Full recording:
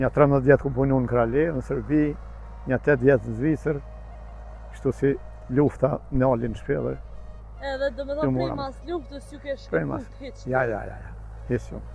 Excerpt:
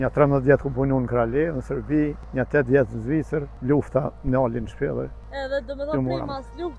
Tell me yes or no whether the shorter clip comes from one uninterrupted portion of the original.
no